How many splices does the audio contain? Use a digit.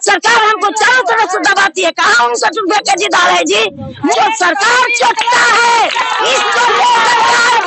1